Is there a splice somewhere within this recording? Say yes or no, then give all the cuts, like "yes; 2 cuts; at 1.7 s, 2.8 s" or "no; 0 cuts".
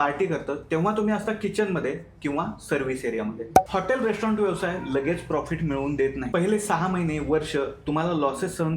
yes; 1 cut; at 3.6 s